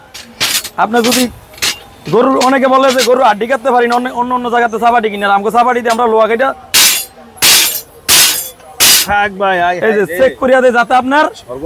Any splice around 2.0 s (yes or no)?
no